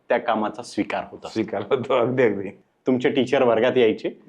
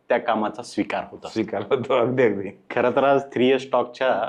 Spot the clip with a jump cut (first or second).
first